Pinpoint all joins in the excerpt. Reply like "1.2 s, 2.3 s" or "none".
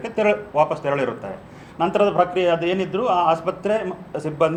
none